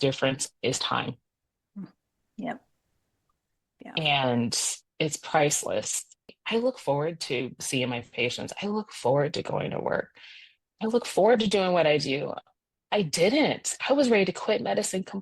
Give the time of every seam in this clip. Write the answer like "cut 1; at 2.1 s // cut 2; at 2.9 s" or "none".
cut 1; at 6.2 s

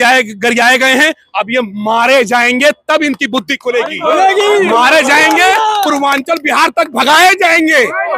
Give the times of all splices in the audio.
none

